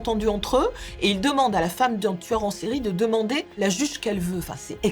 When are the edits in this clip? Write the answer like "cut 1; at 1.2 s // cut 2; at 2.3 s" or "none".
cut 1; at 3.6 s